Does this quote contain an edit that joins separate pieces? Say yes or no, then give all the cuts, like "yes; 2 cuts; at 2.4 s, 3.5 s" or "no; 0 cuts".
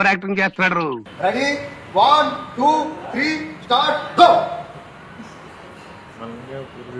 no; 0 cuts